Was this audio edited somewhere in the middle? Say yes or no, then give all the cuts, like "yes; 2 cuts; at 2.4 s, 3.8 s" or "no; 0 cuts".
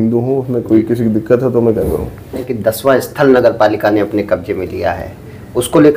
yes; 1 cut; at 2.5 s